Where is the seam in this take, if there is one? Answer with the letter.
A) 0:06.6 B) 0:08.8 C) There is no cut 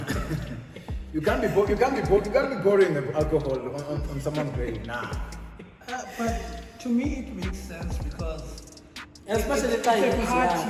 C